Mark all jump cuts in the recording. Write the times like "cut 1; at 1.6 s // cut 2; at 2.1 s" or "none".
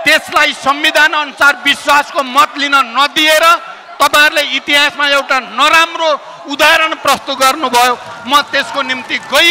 none